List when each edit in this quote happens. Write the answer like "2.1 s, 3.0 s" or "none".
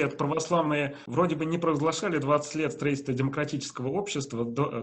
1.0 s

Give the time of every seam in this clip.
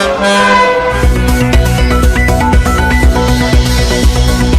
1.0 s, 3.1 s

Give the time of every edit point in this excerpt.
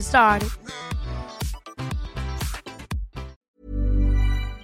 3.4 s

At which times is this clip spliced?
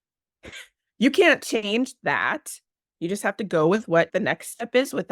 4.1 s

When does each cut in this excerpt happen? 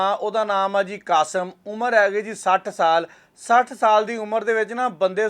none

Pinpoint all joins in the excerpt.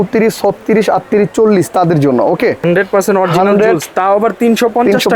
2.6 s

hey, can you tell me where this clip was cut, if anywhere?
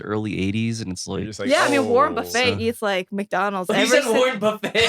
2.8 s

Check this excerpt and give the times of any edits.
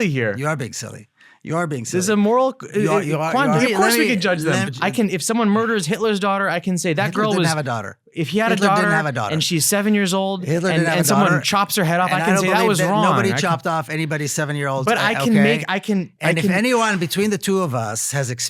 3.6 s, 4.7 s

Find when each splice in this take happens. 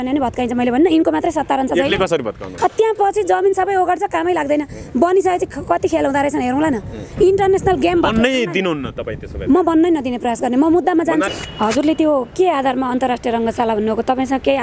11.3 s

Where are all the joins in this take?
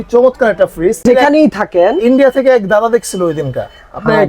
1.0 s

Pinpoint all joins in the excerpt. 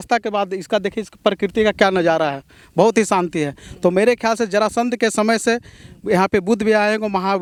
none

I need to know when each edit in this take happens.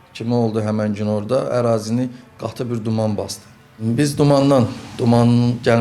none

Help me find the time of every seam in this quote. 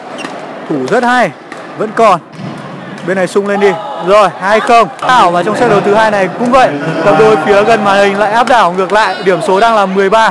5.0 s

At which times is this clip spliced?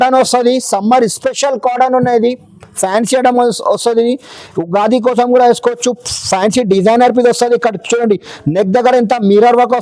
none

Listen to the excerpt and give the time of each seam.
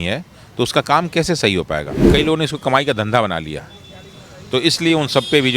2.1 s

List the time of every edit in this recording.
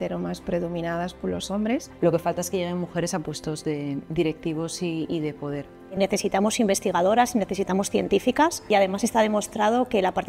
1.9 s, 6.0 s, 8.7 s

